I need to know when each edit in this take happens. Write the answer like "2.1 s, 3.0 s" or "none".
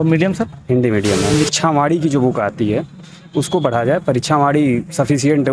1.4 s